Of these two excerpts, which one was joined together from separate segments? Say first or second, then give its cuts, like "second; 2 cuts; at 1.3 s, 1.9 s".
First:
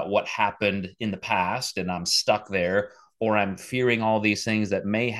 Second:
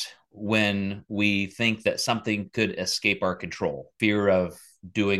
second; 1 cut; at 3.9 s